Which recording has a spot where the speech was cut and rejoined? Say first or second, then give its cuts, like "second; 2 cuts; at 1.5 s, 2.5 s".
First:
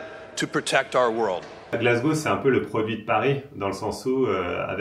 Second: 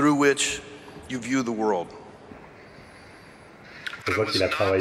first; 1 cut; at 1.6 s